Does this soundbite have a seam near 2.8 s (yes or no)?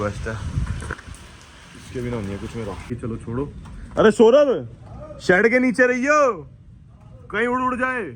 yes